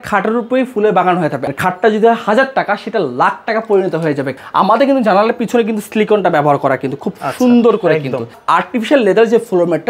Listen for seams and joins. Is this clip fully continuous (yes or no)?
no